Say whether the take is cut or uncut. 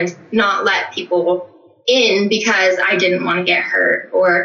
uncut